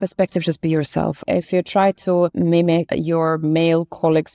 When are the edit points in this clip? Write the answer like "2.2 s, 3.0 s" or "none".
1.2 s, 2.6 s